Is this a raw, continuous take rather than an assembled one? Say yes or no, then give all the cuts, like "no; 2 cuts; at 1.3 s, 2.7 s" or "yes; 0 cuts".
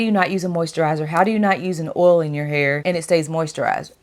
yes; 0 cuts